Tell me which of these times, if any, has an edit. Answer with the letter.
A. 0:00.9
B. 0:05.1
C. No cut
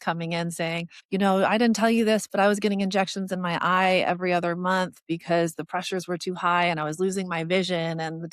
A